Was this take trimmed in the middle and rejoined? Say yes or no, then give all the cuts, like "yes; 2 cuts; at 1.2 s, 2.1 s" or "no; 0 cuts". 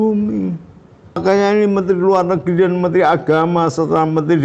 yes; 1 cut; at 1.2 s